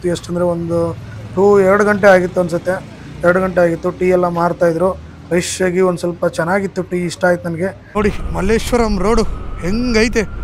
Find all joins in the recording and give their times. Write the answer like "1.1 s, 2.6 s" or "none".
7.8 s